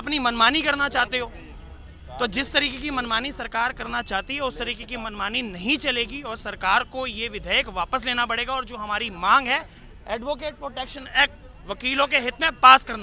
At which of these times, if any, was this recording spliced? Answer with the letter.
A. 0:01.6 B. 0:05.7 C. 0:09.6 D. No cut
D